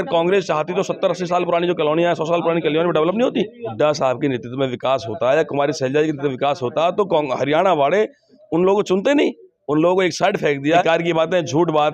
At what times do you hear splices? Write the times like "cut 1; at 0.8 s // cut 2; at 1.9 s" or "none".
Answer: cut 1; at 3.7 s // cut 2; at 10.8 s